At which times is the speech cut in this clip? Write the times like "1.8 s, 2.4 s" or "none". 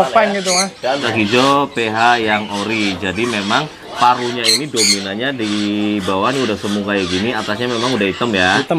1.1 s